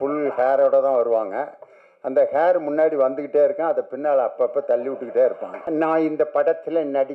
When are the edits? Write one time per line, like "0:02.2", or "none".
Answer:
0:05.5